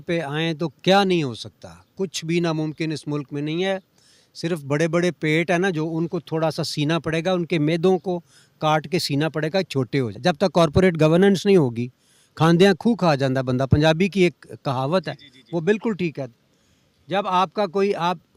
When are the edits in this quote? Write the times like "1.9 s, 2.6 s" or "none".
10.1 s